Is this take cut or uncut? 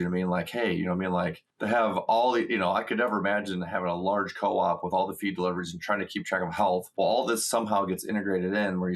cut